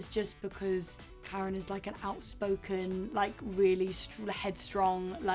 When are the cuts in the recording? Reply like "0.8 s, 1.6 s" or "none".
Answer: none